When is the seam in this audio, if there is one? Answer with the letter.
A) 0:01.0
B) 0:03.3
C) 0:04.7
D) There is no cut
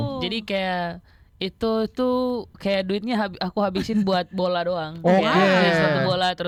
D